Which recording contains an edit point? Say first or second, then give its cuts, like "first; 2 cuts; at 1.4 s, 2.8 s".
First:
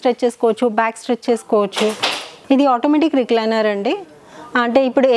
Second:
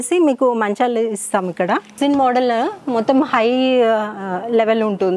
second; 1 cut; at 2.0 s